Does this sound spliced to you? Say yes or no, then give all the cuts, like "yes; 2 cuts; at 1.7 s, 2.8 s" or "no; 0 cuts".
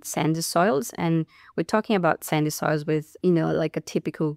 no; 0 cuts